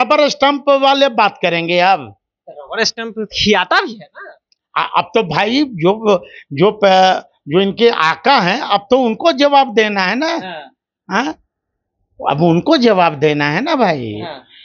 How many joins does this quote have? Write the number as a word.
zero